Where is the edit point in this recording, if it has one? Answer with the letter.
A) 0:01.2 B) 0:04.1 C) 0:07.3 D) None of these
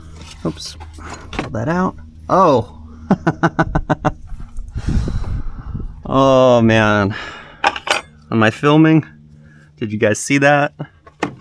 D